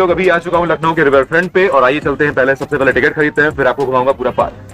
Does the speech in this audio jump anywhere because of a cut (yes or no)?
no